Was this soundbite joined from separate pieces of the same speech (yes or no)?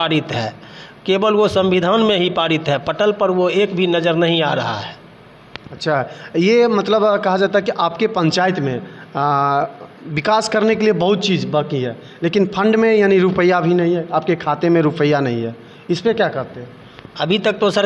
no